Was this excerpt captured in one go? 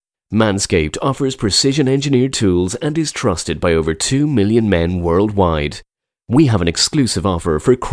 yes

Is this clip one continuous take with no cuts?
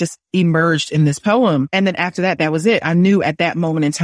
yes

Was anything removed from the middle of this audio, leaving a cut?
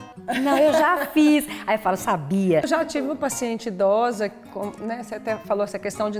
yes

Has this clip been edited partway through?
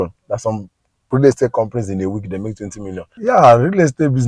yes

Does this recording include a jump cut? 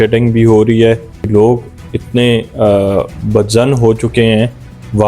yes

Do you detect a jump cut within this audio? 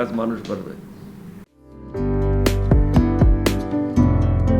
no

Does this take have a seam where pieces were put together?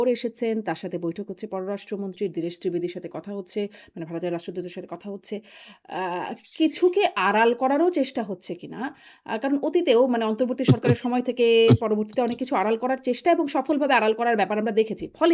no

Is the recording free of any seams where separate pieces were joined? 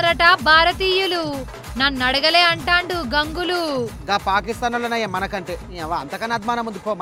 yes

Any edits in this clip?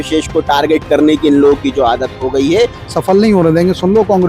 yes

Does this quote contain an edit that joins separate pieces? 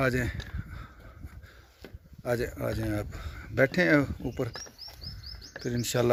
no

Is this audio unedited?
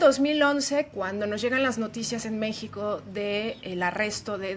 no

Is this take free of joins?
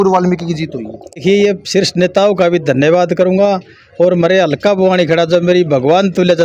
yes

